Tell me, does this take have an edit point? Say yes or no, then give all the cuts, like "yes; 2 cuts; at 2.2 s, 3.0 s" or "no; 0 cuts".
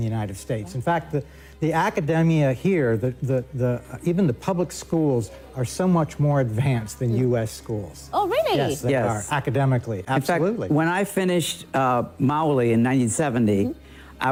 no; 0 cuts